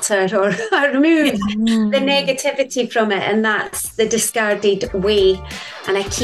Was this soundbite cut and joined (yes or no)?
no